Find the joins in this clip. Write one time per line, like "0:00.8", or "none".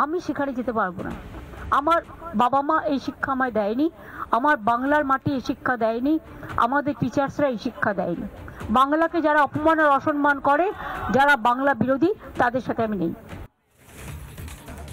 0:13.8